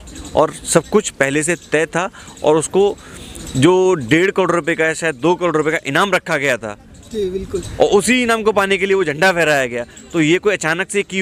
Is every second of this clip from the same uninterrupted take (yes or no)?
yes